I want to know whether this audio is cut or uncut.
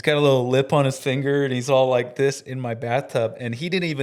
uncut